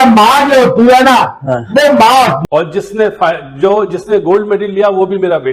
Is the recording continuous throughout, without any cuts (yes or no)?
no